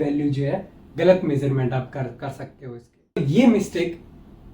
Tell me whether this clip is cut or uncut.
cut